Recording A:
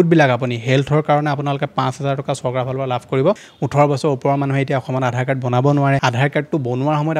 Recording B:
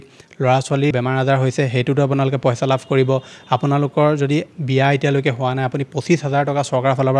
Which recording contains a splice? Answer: A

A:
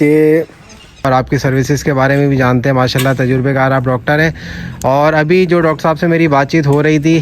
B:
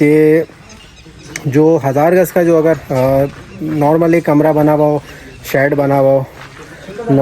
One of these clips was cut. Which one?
A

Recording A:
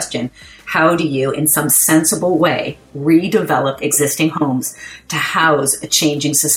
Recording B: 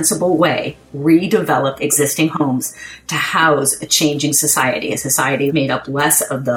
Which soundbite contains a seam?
B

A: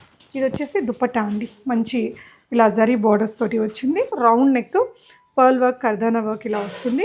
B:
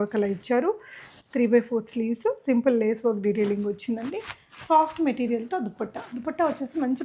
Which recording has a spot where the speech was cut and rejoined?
A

